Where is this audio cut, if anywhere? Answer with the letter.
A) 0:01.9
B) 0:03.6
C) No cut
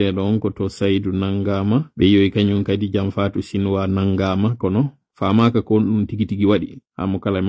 A